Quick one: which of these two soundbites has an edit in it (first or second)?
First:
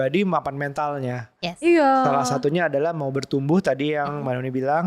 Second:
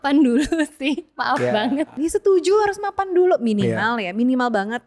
second